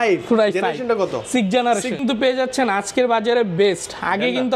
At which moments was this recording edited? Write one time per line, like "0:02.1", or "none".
0:02.0